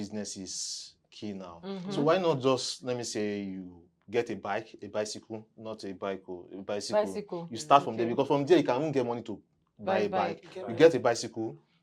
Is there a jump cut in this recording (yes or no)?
no